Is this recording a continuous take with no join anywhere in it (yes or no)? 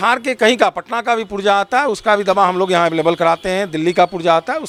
yes